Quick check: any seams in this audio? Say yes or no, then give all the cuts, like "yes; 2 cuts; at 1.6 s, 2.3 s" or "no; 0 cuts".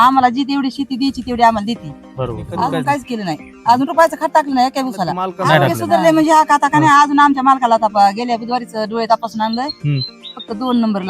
yes; 2 cuts; at 2.5 s, 5.7 s